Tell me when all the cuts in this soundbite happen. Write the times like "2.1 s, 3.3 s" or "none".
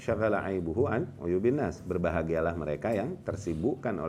none